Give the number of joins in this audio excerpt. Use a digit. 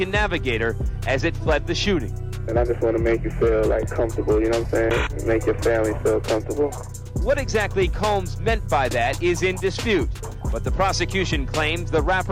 0